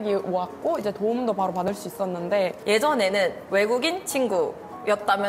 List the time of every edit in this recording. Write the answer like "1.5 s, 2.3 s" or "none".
2.6 s